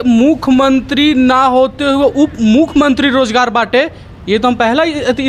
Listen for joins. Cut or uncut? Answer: uncut